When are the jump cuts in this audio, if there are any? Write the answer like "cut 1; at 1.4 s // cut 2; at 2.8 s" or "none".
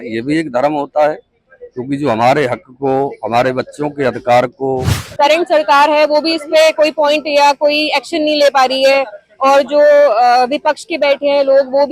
cut 1; at 5.0 s